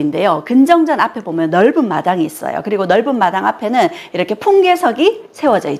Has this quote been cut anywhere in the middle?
no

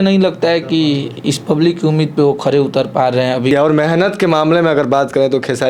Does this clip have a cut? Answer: yes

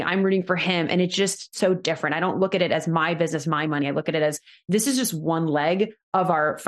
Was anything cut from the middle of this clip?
yes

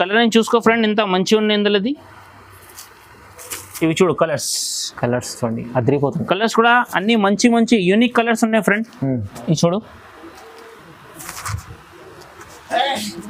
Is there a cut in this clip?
no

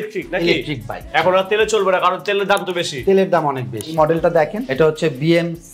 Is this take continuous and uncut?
no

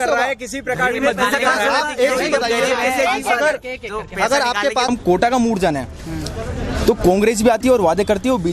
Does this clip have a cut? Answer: yes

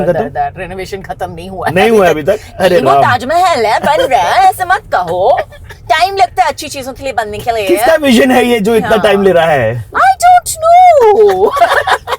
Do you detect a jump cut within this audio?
no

